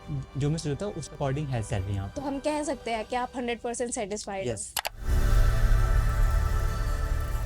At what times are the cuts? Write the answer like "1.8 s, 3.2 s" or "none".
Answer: 4.9 s

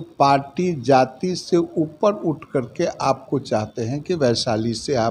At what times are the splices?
none

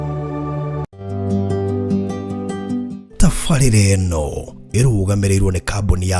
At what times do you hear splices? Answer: 1.0 s

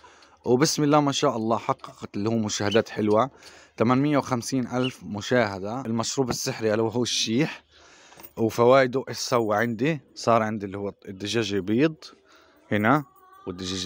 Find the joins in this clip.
5.8 s

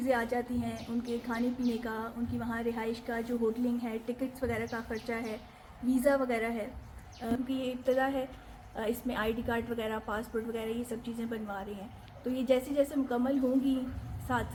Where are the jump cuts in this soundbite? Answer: none

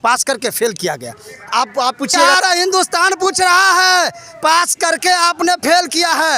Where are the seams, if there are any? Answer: 2.2 s

